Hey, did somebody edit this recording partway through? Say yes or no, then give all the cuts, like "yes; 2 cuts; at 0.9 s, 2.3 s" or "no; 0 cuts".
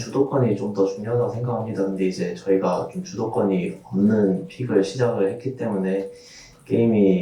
no; 0 cuts